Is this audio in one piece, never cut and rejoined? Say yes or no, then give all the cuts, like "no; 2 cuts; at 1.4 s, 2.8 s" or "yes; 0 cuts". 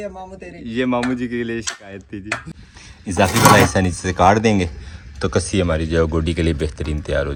yes; 0 cuts